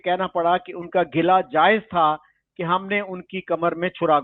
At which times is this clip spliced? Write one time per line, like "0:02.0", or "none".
none